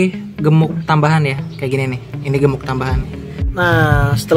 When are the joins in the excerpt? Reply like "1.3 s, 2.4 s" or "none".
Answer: 3.3 s